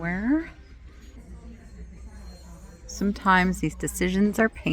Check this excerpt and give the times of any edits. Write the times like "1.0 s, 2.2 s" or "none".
1.2 s